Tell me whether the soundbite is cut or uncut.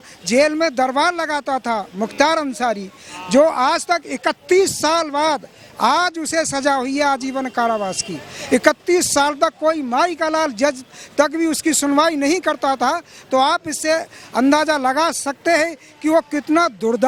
uncut